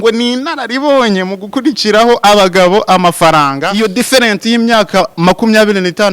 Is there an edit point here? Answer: yes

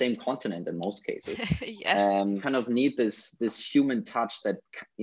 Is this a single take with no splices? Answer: no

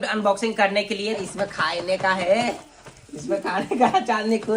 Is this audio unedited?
no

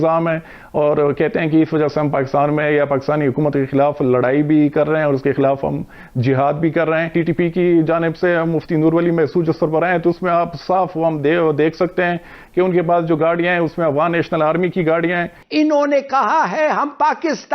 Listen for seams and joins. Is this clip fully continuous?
no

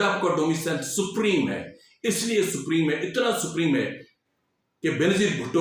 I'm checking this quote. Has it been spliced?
no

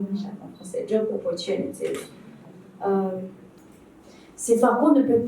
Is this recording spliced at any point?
yes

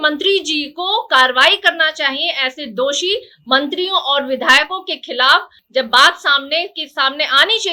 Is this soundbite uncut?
yes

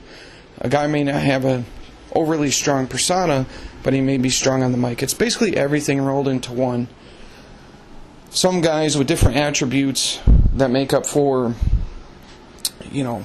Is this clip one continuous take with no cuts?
yes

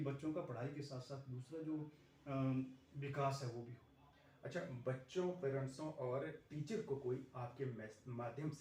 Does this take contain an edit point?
no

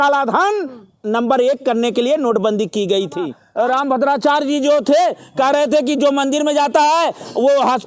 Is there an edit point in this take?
yes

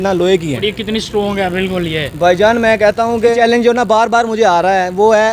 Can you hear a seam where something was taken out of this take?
yes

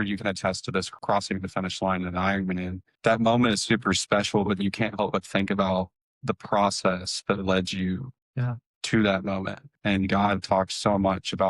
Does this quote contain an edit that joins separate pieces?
yes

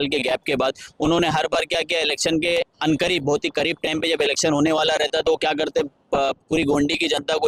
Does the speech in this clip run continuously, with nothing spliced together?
yes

